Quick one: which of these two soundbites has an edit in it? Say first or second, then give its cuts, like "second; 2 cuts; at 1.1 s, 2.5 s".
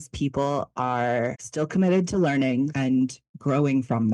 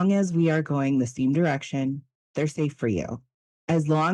first; 2 cuts; at 1.4 s, 3.2 s